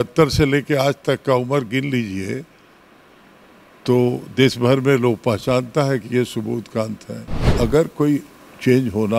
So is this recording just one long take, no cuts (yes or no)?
no